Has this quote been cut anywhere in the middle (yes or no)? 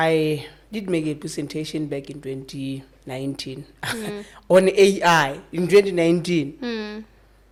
no